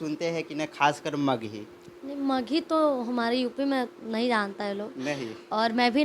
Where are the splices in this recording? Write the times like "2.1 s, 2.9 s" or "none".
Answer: none